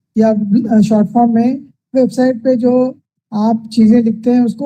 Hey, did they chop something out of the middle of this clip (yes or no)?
no